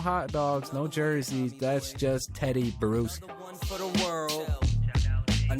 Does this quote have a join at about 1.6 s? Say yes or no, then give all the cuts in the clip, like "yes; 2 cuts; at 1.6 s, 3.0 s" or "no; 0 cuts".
no; 1 cut; at 3.6 s